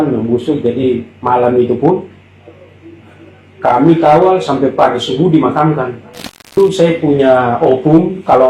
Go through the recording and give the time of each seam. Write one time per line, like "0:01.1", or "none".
0:06.5